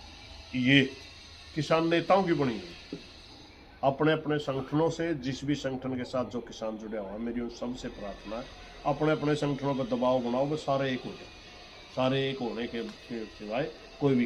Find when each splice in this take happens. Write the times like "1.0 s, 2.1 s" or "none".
none